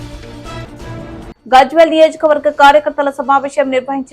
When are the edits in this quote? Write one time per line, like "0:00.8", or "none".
0:01.3

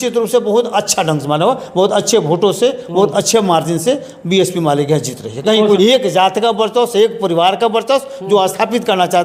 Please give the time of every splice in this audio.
0:05.8

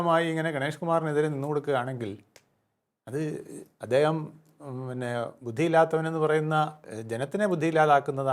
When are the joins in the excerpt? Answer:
0:06.8

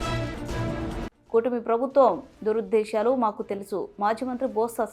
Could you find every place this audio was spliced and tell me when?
0:01.0

